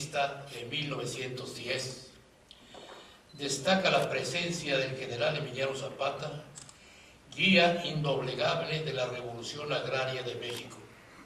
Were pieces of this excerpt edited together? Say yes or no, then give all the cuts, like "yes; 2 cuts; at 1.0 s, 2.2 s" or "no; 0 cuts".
no; 0 cuts